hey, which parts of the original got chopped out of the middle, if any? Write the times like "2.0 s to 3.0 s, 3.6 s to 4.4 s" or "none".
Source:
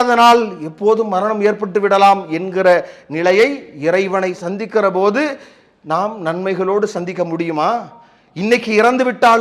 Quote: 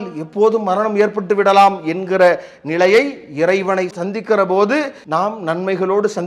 5.4 s to 5.8 s